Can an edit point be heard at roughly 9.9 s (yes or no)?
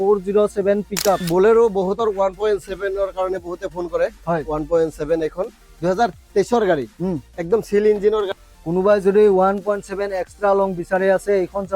no